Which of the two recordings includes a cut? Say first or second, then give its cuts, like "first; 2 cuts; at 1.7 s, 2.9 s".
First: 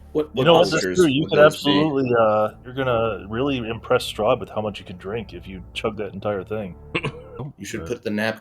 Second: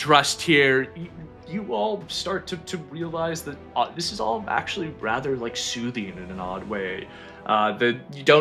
first; 2 cuts; at 2.7 s, 7.4 s